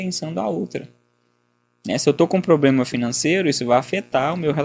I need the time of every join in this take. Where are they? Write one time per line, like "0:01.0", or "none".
none